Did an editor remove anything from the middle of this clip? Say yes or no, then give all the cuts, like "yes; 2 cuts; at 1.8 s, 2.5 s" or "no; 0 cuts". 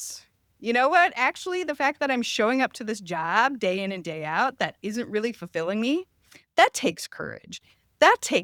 no; 0 cuts